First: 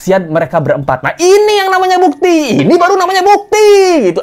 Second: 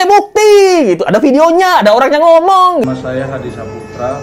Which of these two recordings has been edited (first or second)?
second